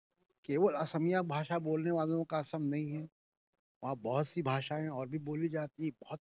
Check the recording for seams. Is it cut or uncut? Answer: uncut